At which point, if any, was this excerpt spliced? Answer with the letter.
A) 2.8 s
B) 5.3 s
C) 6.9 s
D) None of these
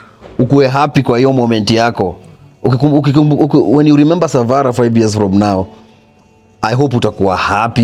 D